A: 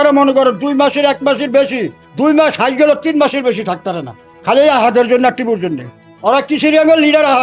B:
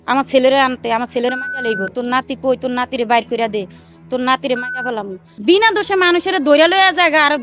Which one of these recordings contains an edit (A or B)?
B